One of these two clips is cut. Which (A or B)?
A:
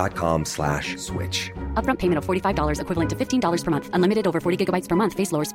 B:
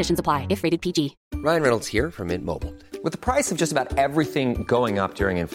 B